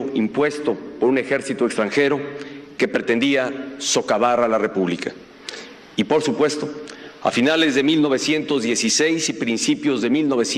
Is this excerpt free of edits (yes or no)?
yes